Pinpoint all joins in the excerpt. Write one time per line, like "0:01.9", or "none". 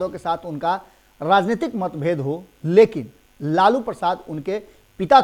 none